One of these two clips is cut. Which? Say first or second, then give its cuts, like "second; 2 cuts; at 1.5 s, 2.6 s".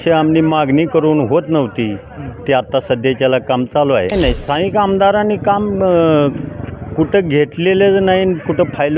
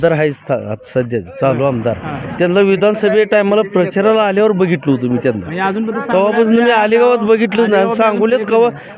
first; 1 cut; at 4.1 s